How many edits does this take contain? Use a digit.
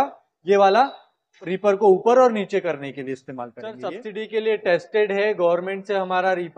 1